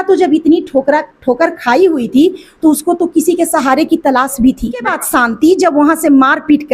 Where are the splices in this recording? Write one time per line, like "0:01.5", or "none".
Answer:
0:04.9

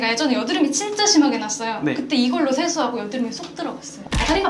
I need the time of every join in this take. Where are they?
none

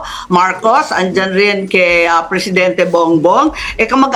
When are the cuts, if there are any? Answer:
none

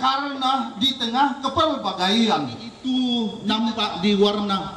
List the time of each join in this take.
0:02.7

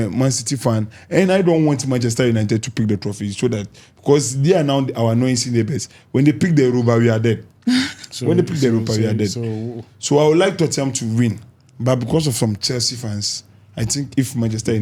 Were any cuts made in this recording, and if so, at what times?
none

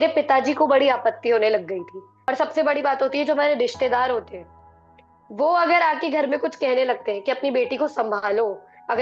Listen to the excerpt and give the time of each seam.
0:02.1

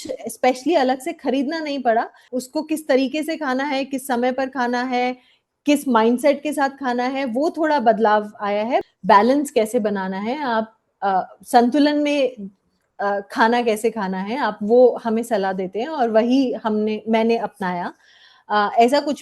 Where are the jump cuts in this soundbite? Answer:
0:02.3
0:08.8

